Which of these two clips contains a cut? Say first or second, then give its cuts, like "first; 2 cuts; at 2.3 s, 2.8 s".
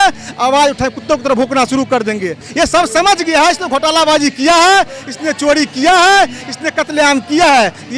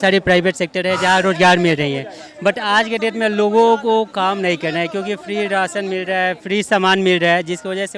first; 1 cut; at 2.4 s